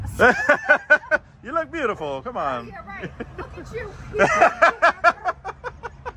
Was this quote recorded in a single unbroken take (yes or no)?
yes